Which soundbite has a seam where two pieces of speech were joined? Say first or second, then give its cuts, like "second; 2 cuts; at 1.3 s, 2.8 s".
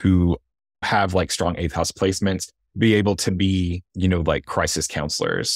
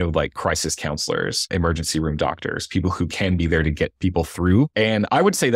first; 2 cuts; at 0.9 s, 2.6 s